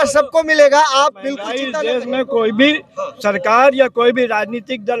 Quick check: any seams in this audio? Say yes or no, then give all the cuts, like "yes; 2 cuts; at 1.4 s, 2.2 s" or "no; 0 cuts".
yes; 1 cut; at 1.6 s